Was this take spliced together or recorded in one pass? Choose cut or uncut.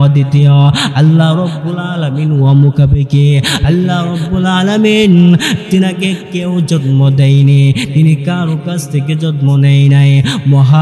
uncut